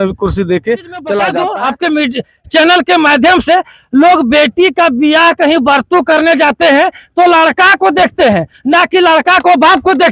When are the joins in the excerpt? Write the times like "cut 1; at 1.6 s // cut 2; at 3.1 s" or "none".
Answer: cut 1; at 1.5 s